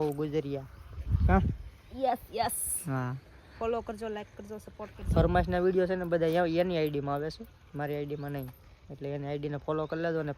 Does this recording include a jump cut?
no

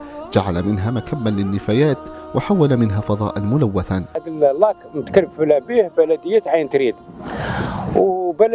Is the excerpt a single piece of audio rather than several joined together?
no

